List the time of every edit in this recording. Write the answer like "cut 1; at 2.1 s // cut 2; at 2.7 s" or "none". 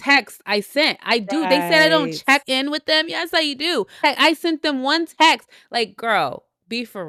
none